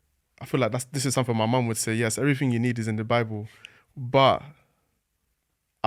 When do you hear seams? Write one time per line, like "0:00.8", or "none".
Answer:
none